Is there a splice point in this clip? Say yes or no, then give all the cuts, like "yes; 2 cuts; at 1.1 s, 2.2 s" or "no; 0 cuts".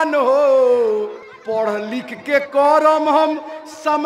yes; 1 cut; at 1.3 s